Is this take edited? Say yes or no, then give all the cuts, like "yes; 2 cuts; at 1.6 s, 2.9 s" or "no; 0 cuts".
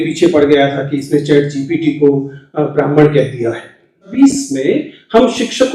yes; 1 cut; at 4.1 s